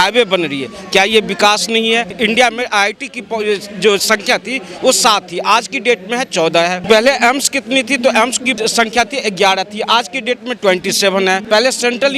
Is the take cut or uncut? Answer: cut